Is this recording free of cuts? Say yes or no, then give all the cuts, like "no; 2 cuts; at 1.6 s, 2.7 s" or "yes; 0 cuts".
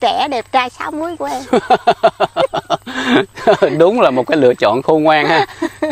yes; 0 cuts